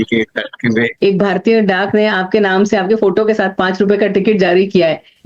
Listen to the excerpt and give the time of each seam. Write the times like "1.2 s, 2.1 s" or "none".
0.9 s